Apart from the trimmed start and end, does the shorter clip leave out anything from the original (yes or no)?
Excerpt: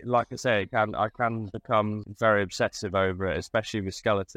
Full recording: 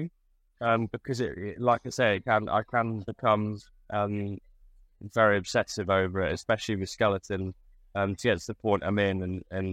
yes